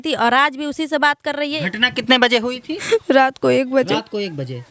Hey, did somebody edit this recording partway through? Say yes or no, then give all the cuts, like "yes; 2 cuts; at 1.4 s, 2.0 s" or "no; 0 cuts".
yes; 1 cut; at 1.5 s